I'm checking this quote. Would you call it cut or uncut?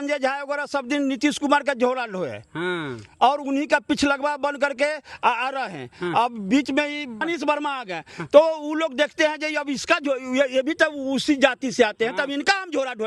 uncut